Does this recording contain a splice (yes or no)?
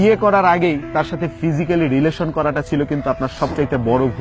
no